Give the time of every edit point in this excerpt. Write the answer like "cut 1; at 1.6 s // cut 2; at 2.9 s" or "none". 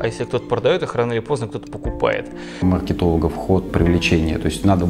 cut 1; at 2.6 s // cut 2; at 3.7 s